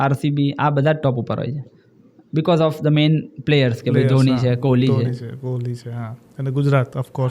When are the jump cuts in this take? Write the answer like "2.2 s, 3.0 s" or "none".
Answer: none